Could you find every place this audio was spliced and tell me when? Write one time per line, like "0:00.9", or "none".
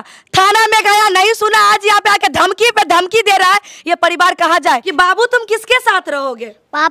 0:04.9